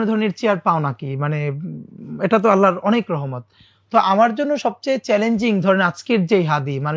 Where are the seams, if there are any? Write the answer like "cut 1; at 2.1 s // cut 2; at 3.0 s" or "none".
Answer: none